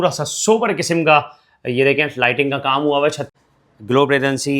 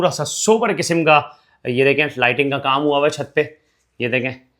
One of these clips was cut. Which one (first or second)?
first